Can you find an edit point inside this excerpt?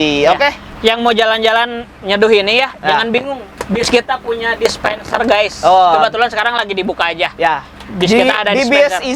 no; 0 cuts

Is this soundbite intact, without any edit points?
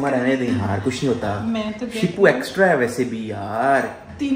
yes; 0 cuts

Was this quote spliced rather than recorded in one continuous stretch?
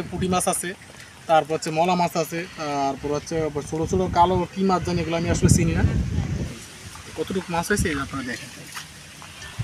yes; 1 cut; at 6.5 s

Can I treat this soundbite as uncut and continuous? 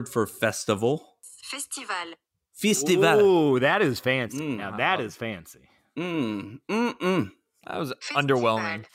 no; 1 cut; at 1.3 s

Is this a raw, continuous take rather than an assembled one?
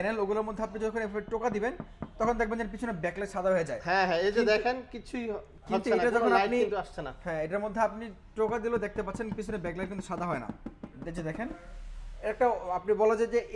yes; 0 cuts

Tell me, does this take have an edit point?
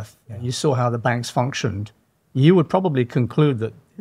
no; 0 cuts

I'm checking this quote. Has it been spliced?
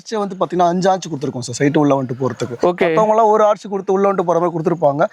no; 0 cuts

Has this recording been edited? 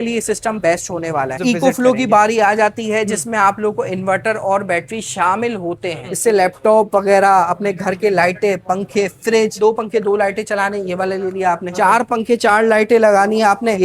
yes; 4 cuts; at 1.4 s, 6.1 s, 9.6 s, 11.7 s

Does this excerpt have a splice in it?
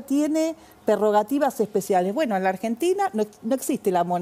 no; 0 cuts

